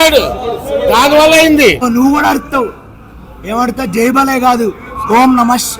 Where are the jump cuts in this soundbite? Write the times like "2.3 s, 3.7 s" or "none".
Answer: 1.8 s